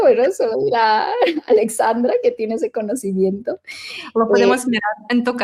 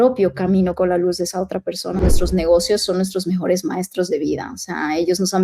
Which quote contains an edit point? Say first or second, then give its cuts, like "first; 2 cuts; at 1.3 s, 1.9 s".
second; 1 cut; at 2.0 s